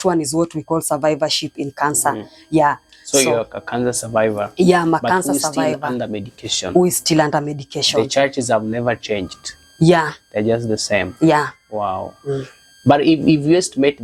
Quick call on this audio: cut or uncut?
uncut